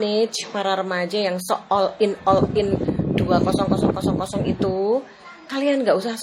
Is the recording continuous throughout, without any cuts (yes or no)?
yes